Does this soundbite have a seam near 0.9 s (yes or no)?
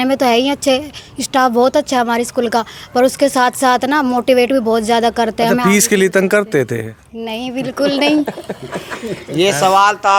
no